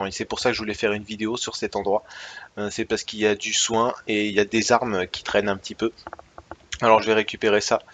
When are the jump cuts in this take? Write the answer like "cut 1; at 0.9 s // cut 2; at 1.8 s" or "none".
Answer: cut 1; at 5.7 s